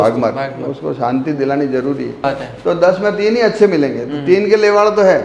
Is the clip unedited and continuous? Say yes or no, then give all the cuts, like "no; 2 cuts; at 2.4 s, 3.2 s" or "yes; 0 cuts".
no; 1 cut; at 2.2 s